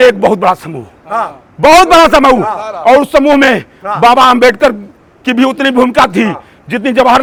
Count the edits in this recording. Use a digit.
0